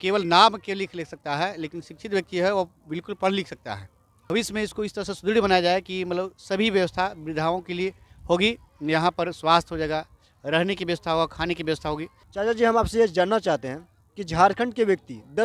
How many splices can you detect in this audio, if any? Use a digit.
2